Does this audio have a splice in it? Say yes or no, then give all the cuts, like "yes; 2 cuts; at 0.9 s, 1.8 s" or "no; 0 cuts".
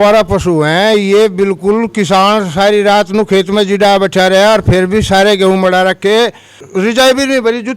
yes; 1 cut; at 6.6 s